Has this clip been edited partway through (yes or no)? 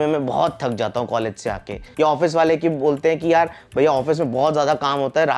no